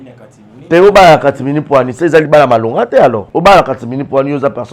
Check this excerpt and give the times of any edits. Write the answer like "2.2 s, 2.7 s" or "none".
3.2 s